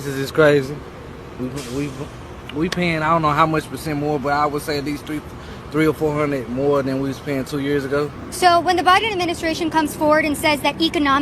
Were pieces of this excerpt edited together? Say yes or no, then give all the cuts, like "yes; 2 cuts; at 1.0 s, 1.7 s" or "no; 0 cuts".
no; 0 cuts